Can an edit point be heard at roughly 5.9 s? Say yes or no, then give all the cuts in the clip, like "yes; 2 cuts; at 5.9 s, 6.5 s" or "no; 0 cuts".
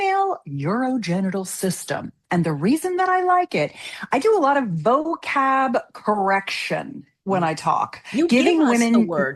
no; 0 cuts